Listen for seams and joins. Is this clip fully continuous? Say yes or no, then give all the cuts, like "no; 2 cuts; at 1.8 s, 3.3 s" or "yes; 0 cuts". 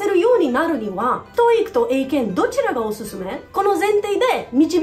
yes; 0 cuts